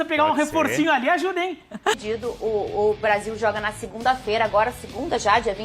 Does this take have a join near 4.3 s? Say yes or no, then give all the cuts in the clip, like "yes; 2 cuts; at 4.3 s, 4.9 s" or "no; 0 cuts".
no; 1 cut; at 2.0 s